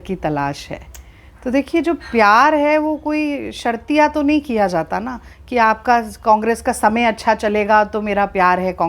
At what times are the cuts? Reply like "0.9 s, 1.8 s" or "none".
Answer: none